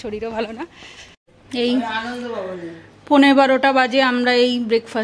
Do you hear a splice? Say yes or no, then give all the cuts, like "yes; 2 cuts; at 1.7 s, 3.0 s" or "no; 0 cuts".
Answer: yes; 1 cut; at 1.2 s